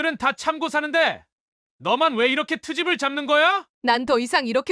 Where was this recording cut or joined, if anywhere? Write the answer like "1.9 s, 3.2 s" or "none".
3.7 s